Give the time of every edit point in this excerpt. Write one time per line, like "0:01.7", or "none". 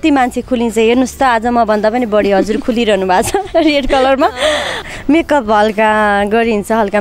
0:04.7